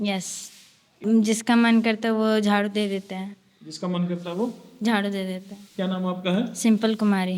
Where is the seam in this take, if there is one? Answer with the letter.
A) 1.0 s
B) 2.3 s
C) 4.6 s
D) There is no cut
A